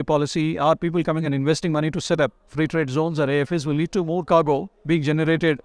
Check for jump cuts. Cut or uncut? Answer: uncut